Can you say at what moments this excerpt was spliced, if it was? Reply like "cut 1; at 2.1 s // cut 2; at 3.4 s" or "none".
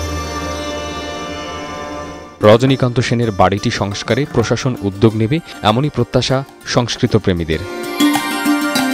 cut 1; at 2.2 s